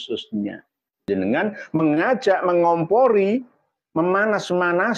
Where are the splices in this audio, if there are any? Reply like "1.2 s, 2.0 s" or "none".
1.1 s